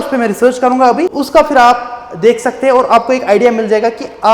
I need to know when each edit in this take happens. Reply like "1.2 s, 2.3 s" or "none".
1.2 s